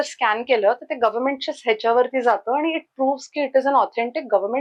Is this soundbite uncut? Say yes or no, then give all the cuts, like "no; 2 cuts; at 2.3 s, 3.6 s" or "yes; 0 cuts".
yes; 0 cuts